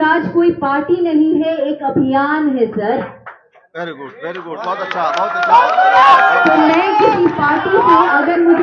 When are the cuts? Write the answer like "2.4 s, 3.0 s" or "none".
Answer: none